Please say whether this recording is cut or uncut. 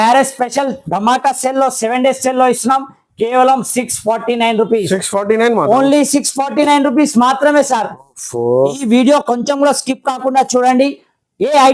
uncut